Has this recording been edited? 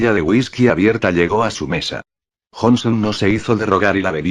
yes; 1 cut; at 2.4 s

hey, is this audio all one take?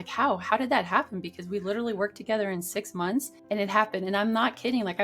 no; 1 cut; at 3.3 s

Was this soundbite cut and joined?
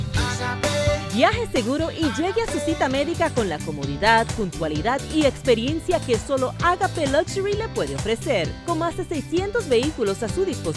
no; 0 cuts

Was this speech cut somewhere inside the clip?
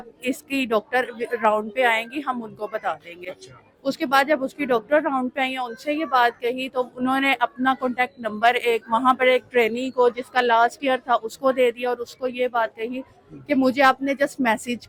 no; 0 cuts

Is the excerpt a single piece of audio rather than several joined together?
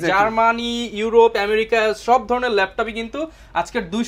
yes; 0 cuts

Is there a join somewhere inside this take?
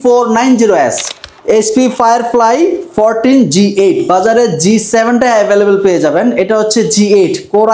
yes; 1 cut; at 1.2 s

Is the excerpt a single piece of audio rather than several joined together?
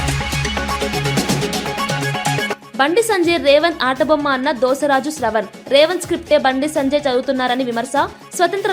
yes; 0 cuts

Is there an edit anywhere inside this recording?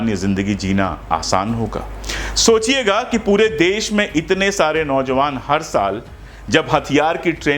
no; 0 cuts

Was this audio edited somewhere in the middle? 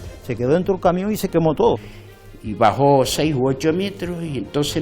yes; 1 cut; at 1.9 s

